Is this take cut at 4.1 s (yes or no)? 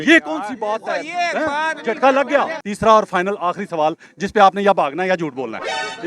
no